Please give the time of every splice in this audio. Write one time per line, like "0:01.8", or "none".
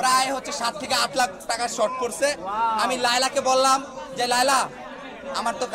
none